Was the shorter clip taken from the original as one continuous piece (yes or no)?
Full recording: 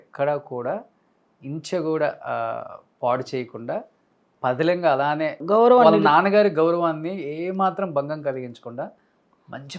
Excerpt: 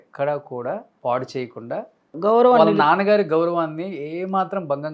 no